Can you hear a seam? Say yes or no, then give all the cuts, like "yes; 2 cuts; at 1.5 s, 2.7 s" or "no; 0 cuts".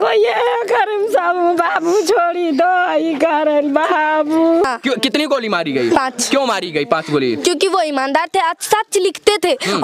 yes; 1 cut; at 4.6 s